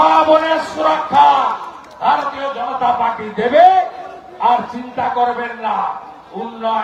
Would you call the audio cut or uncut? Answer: uncut